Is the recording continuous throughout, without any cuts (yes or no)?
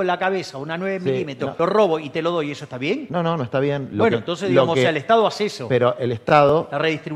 no